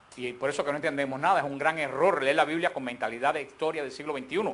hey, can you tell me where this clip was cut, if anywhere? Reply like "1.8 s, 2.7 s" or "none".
none